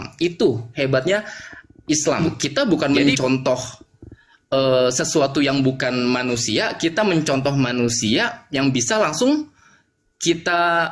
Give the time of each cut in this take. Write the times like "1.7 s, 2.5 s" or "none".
2.2 s